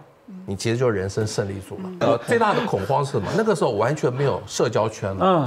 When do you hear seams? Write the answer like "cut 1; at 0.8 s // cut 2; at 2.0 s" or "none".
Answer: cut 1; at 2.1 s